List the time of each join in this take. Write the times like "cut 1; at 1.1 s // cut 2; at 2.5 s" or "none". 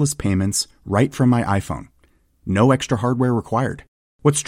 none